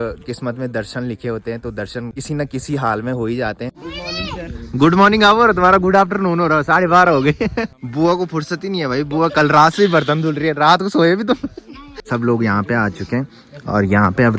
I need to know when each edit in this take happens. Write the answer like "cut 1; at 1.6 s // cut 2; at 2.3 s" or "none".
cut 1; at 2.2 s // cut 2; at 3.7 s // cut 3; at 7.8 s // cut 4; at 12.0 s